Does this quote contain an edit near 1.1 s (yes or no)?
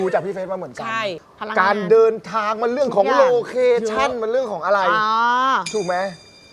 yes